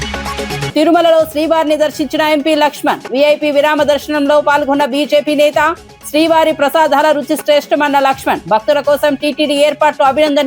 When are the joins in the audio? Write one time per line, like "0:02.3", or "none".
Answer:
none